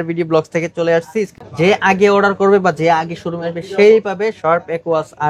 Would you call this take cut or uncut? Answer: cut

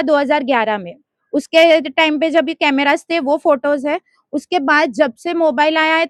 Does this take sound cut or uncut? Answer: uncut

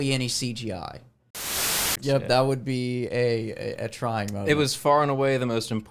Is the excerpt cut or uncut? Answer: cut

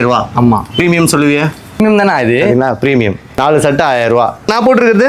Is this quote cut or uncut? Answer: uncut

